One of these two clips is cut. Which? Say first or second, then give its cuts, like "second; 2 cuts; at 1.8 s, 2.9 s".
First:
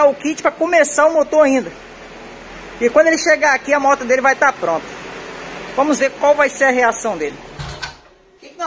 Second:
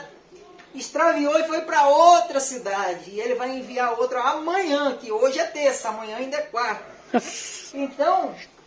first; 1 cut; at 7.4 s